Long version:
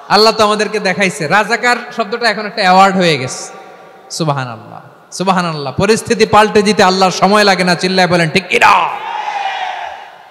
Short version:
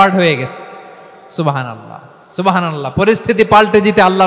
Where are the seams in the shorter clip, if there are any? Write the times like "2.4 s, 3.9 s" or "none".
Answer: none